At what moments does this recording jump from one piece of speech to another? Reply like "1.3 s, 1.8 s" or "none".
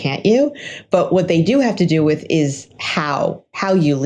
none